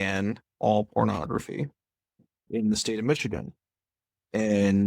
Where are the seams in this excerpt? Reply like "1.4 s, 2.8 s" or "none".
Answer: 2.4 s